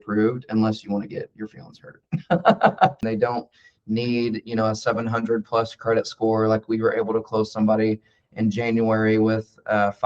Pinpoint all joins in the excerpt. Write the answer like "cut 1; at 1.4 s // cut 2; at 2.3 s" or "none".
cut 1; at 3.0 s